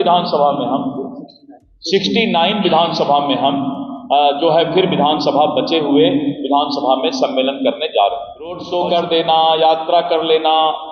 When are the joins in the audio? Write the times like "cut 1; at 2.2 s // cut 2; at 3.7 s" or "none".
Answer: cut 1; at 8.6 s